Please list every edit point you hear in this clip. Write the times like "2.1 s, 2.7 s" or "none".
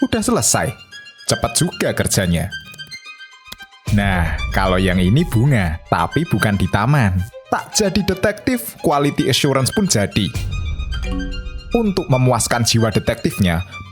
13.0 s